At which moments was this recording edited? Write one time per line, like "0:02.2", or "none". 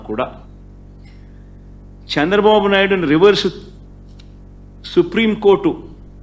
none